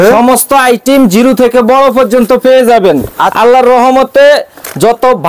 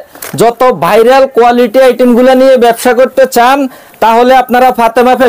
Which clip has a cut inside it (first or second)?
first